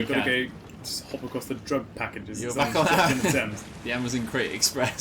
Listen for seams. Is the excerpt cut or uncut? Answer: uncut